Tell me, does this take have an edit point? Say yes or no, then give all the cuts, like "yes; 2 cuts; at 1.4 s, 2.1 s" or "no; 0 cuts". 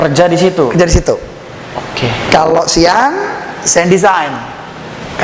no; 0 cuts